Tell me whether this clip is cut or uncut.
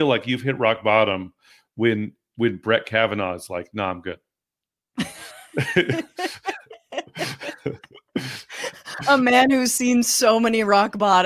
uncut